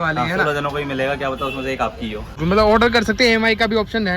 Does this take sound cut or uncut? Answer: cut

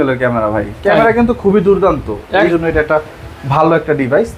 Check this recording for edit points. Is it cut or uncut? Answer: cut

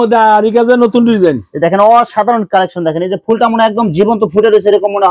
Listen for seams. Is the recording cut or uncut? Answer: uncut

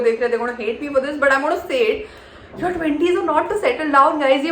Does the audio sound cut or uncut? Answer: uncut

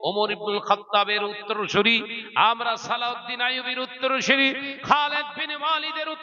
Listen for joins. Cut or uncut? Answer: uncut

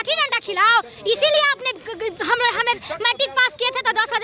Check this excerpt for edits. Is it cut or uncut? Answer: uncut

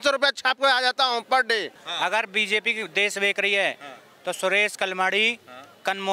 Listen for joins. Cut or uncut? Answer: cut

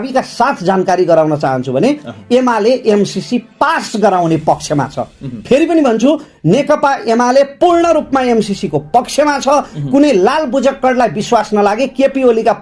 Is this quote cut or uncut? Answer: uncut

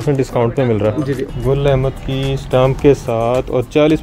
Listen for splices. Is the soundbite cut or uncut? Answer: cut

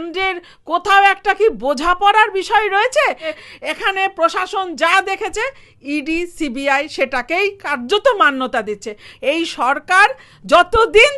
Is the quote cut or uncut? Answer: cut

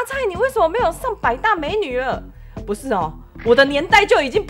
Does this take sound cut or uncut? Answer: uncut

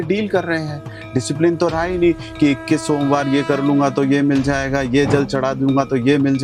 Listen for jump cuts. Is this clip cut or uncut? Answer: uncut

